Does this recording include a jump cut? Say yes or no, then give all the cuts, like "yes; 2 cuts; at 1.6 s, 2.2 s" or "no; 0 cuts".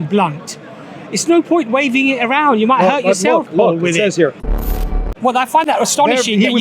yes; 1 cut; at 4.7 s